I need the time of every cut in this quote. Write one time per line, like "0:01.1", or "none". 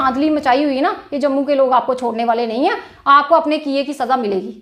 none

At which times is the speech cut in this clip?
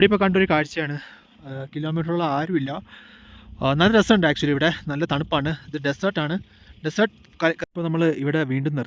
0:07.7

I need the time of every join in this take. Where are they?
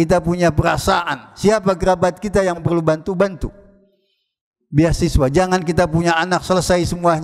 0:02.6

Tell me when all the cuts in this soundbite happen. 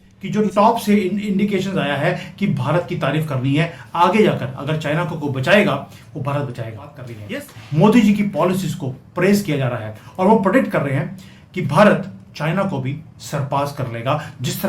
0:07.3

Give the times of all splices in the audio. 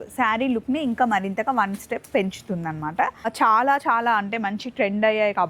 0:03.3

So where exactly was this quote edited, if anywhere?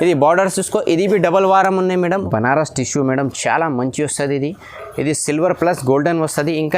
0:02.1

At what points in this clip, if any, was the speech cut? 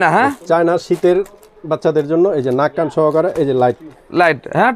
none

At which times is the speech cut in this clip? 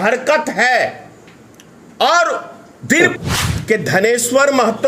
0:03.0

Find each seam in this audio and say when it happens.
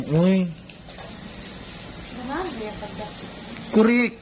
none

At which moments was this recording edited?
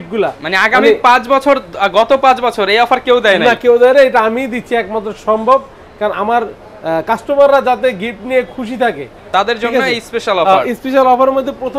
none

